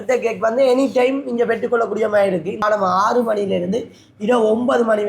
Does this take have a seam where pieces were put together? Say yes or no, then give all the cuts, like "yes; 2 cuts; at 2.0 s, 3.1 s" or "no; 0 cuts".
yes; 1 cut; at 2.6 s